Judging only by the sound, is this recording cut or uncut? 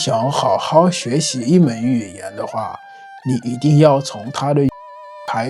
uncut